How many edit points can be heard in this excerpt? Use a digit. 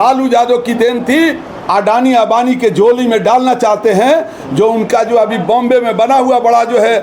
1